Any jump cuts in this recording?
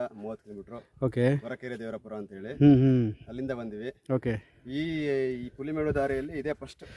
no; 0 cuts

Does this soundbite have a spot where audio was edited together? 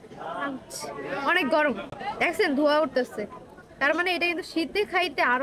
no; 0 cuts

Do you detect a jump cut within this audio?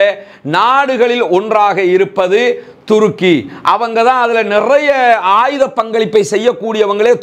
no; 0 cuts

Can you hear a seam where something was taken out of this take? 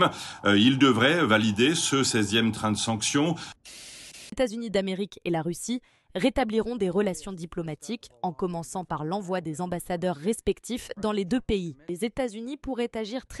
yes; 2 cuts; at 3.5 s, 11.9 s

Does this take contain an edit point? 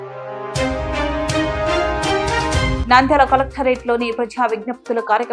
yes; 1 cut; at 2.7 s

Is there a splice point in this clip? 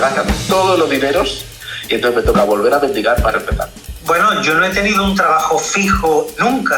yes; 1 cut; at 3.7 s

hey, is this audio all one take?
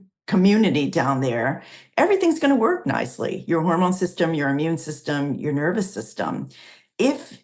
yes; 0 cuts

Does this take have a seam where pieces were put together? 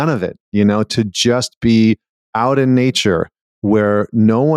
no; 0 cuts

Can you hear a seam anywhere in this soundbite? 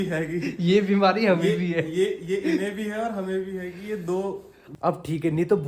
yes; 1 cut; at 4.6 s

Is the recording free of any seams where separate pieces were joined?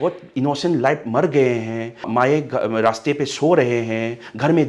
yes; 0 cuts

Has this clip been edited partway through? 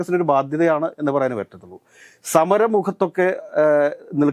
no; 0 cuts

